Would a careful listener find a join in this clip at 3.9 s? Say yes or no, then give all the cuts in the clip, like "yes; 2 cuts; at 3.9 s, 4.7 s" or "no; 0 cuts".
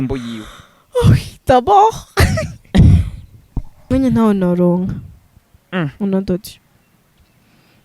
yes; 1 cut; at 3.9 s